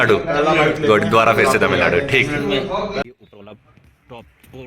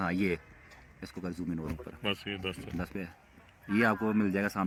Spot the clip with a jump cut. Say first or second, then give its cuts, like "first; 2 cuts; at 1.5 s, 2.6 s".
first; 1 cut; at 3.2 s